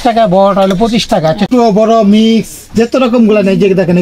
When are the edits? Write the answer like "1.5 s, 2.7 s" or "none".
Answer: 1.5 s